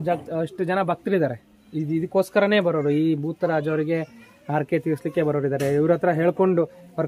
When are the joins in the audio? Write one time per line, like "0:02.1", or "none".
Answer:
none